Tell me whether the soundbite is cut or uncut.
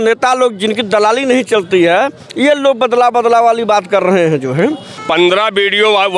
cut